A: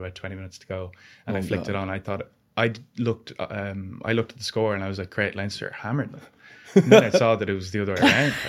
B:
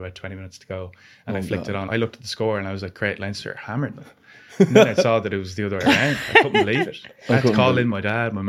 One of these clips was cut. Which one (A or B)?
B